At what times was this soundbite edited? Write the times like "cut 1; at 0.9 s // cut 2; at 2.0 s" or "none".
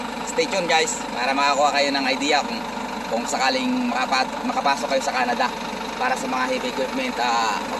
none